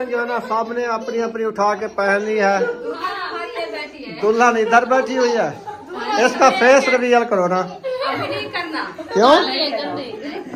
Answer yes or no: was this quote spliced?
no